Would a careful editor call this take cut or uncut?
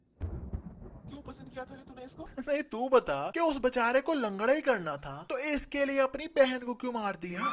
cut